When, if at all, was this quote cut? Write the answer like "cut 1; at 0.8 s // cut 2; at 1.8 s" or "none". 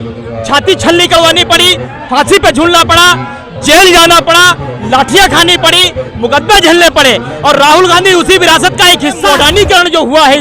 cut 1; at 9.2 s